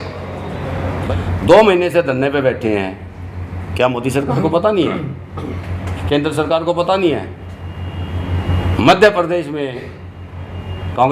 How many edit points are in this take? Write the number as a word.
one